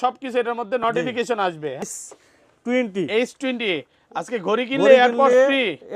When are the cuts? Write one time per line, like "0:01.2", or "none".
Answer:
0:01.8